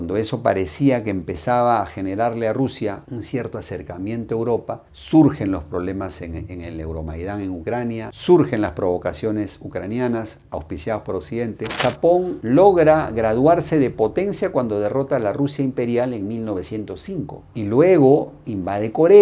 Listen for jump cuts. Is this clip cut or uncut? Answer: cut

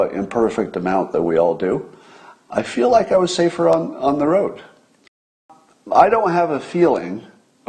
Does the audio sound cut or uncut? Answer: cut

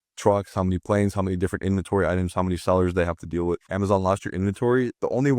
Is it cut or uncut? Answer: cut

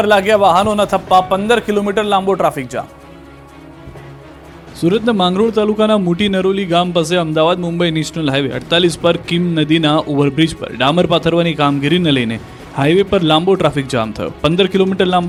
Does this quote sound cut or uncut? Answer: uncut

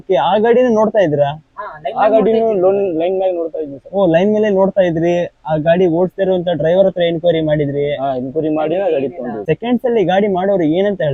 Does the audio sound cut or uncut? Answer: cut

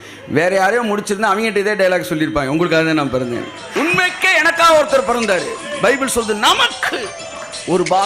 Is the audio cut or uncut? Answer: cut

